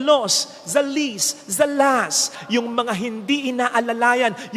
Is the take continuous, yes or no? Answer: no